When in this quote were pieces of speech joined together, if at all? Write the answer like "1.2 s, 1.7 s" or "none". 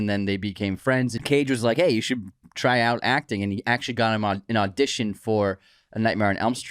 1.2 s